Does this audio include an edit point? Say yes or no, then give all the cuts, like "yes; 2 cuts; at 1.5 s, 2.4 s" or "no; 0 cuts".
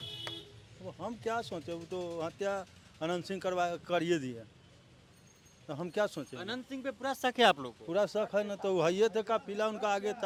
no; 0 cuts